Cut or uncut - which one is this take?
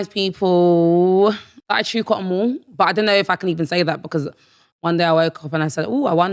cut